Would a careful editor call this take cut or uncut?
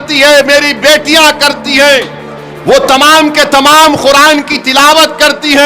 uncut